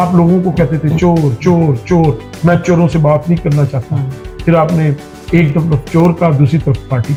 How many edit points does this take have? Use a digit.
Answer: 0